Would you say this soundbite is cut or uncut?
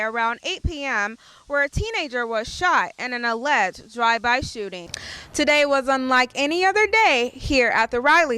cut